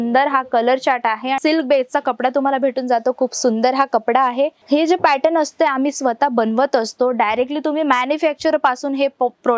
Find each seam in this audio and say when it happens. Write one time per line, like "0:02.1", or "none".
0:01.4
0:04.6